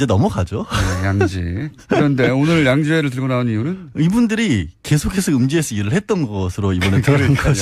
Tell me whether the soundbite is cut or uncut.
uncut